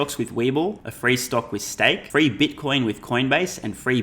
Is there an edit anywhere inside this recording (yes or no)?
yes